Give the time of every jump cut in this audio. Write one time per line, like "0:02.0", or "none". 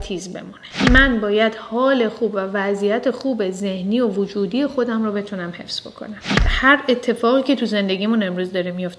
0:00.8
0:06.5